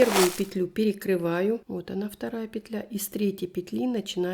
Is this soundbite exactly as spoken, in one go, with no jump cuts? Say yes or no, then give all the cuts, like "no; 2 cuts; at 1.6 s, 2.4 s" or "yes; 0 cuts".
no; 1 cut; at 1.7 s